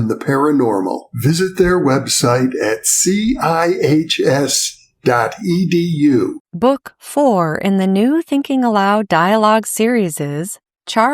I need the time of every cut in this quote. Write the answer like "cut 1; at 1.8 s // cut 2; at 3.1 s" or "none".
cut 1; at 6.4 s